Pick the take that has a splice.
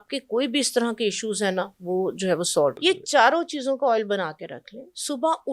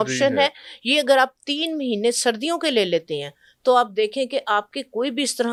first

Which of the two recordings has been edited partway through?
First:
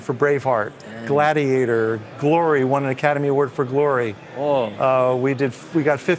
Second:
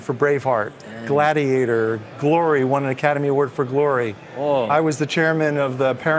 second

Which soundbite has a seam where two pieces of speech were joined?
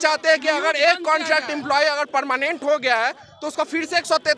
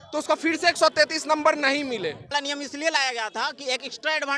second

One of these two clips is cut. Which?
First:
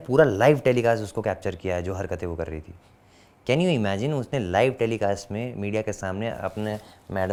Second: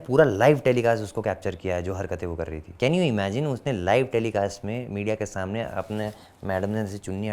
second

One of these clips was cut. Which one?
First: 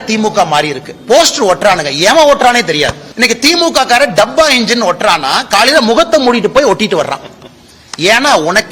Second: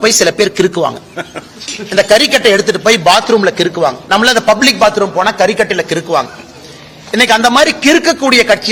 first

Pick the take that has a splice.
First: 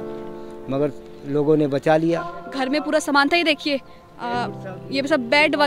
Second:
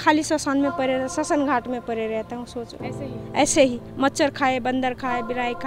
first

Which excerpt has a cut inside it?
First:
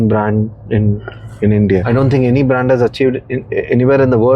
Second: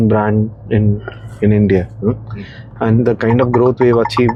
first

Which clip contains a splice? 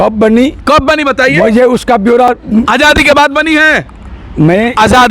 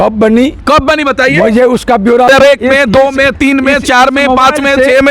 second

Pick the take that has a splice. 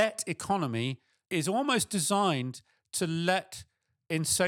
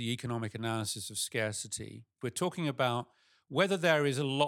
second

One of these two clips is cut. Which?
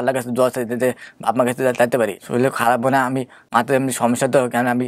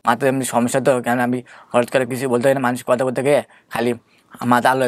first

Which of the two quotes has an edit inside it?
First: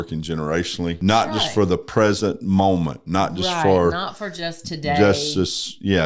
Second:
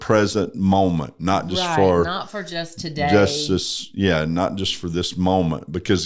first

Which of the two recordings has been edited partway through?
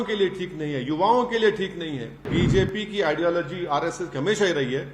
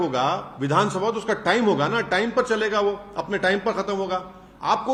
first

